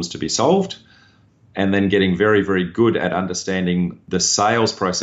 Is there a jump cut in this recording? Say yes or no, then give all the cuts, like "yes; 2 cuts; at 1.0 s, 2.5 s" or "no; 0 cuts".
yes; 1 cut; at 4.0 s